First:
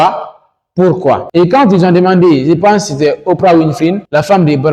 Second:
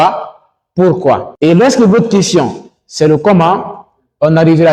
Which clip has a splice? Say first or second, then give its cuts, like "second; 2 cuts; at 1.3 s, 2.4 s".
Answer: first; 1 cut; at 1.3 s